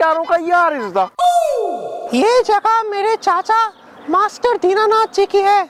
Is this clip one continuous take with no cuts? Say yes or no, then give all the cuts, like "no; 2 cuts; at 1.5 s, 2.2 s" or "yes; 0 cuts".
yes; 0 cuts